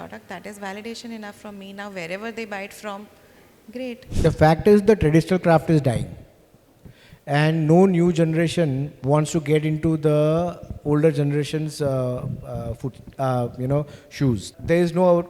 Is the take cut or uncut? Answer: cut